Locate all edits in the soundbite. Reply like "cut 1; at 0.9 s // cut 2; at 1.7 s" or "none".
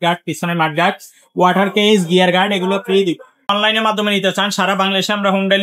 cut 1; at 3.5 s